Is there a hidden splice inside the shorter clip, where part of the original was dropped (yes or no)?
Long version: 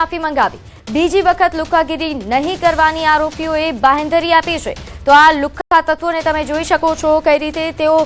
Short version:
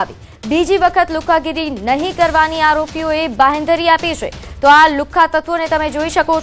yes